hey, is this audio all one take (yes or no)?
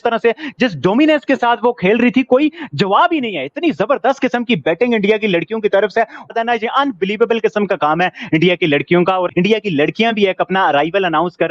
yes